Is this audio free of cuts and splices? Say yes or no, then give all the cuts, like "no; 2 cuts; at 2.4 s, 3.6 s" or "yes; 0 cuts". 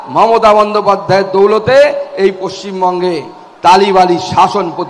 yes; 0 cuts